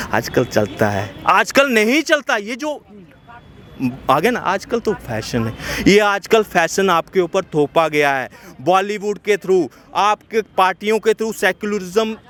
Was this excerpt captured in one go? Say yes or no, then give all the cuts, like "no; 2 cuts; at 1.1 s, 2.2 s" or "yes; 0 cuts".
yes; 0 cuts